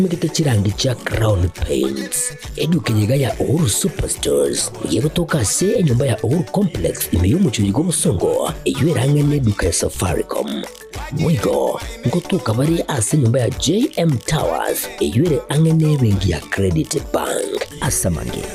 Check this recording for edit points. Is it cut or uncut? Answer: uncut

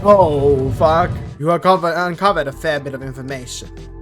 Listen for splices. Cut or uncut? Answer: cut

